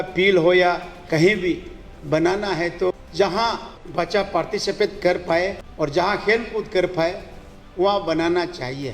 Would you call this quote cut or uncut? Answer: cut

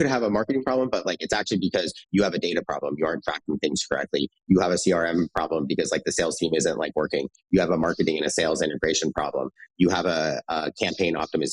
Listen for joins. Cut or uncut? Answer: uncut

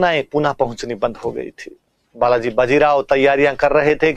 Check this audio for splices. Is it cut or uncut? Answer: uncut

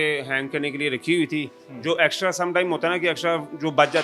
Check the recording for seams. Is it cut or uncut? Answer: uncut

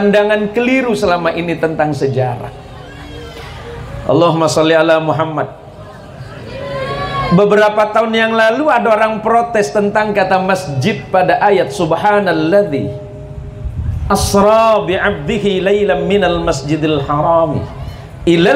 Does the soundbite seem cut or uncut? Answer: uncut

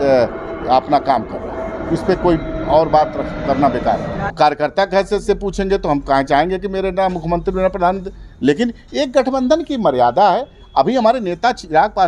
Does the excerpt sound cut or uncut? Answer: cut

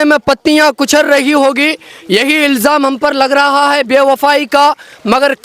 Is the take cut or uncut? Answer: uncut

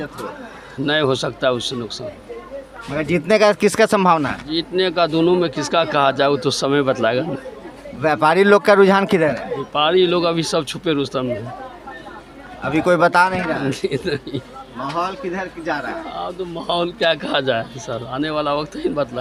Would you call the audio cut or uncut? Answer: uncut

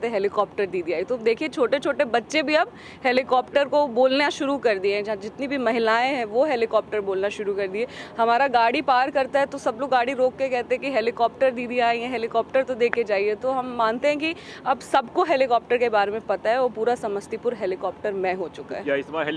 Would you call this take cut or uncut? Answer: uncut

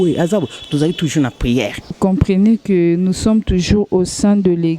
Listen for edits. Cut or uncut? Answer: cut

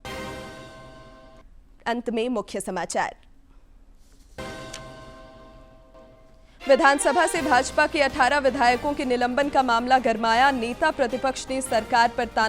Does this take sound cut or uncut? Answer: cut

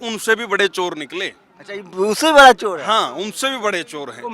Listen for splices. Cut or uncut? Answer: uncut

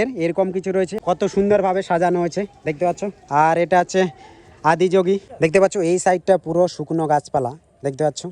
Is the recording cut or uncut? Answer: cut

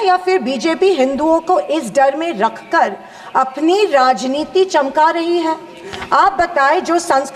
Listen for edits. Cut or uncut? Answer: uncut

